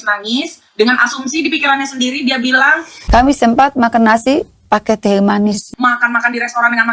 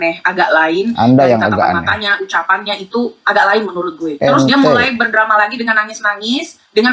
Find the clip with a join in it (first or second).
first